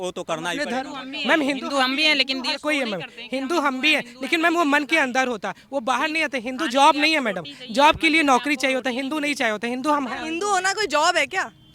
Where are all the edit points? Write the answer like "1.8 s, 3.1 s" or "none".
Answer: none